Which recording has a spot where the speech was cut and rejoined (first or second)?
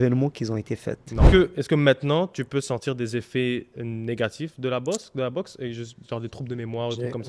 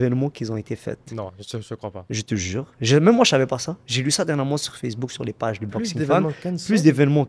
first